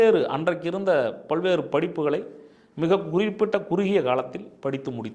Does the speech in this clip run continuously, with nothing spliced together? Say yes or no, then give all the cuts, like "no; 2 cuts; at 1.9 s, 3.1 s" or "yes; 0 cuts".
yes; 0 cuts